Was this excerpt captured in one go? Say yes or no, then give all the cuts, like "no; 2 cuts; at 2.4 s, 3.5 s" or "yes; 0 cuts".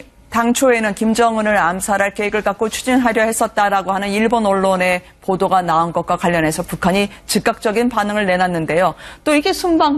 no; 1 cut; at 2.6 s